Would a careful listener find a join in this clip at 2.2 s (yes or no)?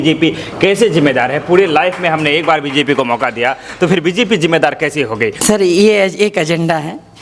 no